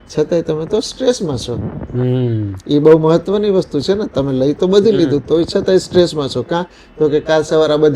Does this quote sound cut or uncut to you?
uncut